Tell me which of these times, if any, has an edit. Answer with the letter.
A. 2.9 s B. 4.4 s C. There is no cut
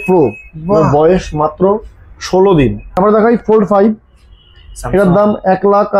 A